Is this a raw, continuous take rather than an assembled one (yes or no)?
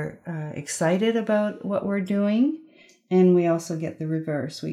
yes